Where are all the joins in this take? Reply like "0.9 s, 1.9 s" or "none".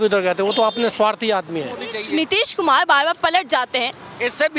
1.9 s